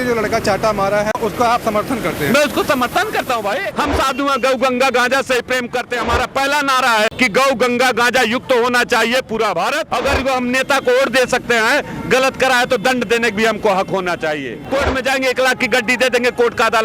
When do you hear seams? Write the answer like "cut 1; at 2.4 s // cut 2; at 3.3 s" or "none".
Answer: cut 1; at 1.2 s // cut 2; at 3.7 s // cut 3; at 7.1 s // cut 4; at 9.9 s // cut 5; at 14.6 s